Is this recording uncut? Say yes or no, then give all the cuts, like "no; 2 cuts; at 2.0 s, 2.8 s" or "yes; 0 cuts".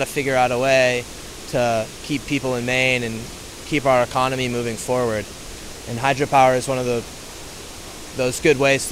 yes; 0 cuts